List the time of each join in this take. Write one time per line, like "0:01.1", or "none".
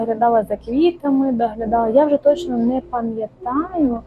none